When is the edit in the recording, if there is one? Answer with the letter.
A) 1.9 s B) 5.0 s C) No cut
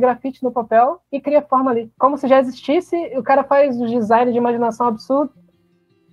A